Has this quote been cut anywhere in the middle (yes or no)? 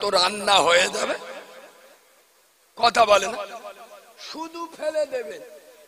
no